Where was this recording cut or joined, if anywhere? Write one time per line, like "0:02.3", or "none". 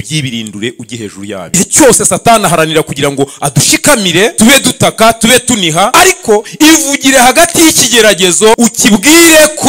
0:01.5
0:04.3
0:05.9
0:08.6